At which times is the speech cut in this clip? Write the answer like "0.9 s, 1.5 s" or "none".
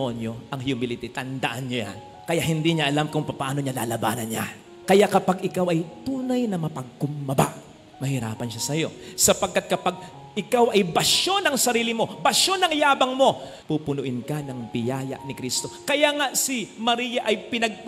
none